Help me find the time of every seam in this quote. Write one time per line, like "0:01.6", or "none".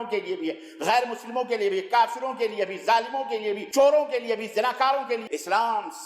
0:03.6
0:05.2